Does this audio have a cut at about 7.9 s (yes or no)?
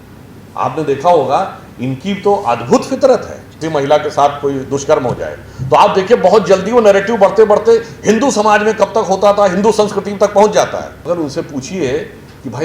no